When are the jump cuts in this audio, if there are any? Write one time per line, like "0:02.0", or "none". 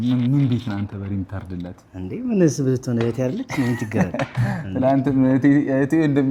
none